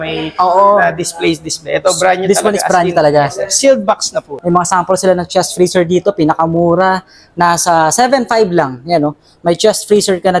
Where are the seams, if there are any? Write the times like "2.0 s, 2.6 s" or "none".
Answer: 4.1 s